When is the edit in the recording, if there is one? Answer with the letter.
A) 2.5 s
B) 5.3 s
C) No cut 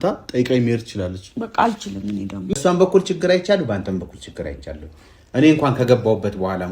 A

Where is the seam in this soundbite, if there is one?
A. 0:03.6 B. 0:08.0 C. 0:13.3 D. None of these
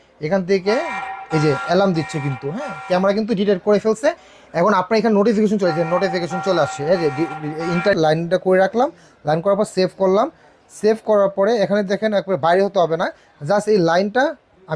B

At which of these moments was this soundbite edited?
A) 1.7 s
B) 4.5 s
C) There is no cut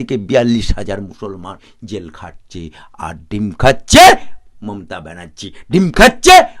A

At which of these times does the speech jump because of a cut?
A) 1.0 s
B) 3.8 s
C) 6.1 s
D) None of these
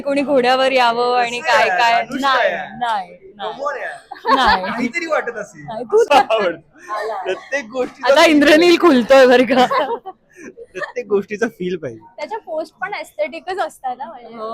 C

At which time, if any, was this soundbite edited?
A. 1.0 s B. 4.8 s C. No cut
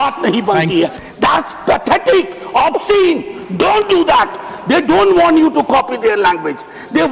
A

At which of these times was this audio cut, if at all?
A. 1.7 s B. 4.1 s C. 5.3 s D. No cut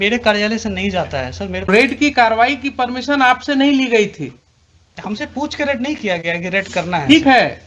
A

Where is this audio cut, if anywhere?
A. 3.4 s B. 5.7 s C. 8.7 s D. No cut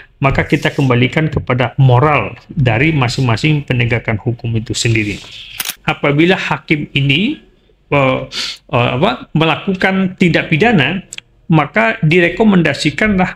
B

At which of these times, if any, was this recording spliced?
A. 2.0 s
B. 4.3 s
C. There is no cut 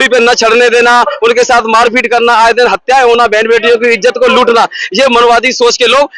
C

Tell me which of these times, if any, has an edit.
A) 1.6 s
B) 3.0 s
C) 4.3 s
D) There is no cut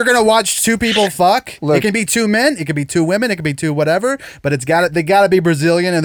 D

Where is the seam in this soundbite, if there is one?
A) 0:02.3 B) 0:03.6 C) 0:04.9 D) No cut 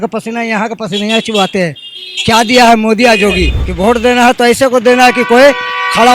B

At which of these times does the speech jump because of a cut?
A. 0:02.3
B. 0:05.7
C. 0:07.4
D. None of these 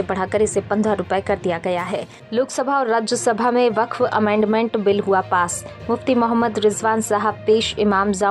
A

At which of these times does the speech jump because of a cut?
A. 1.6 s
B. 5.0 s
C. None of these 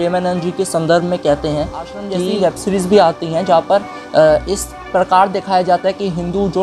A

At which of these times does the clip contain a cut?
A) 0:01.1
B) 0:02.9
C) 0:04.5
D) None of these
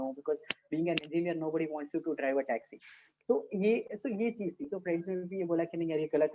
D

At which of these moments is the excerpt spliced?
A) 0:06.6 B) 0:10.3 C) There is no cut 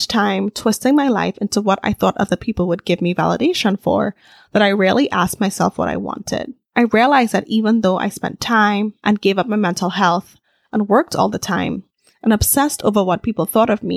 C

